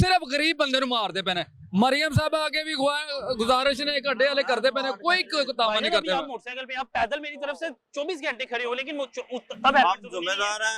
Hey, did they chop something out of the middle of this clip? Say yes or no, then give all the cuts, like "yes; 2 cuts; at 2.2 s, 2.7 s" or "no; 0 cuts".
no; 0 cuts